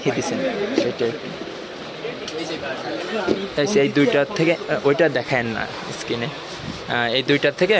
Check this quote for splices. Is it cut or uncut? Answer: uncut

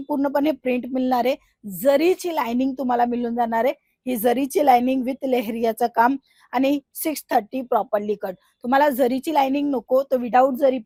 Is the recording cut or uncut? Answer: uncut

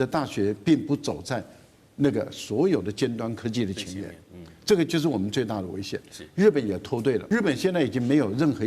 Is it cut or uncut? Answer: cut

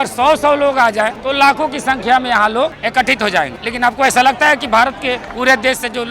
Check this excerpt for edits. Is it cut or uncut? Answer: cut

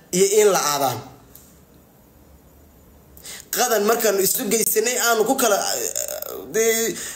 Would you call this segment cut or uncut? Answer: cut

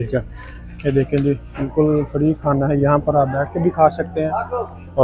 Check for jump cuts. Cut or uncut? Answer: uncut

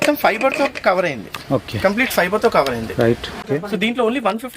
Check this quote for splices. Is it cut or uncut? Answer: cut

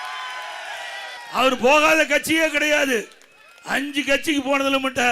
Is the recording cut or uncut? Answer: cut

